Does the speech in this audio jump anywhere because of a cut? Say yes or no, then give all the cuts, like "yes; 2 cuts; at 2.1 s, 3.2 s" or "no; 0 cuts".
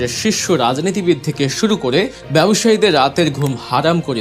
yes; 1 cut; at 2.2 s